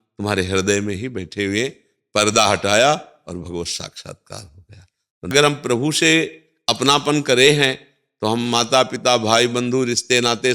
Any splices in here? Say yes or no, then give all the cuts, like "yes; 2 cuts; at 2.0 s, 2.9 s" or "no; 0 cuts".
yes; 1 cut; at 5.3 s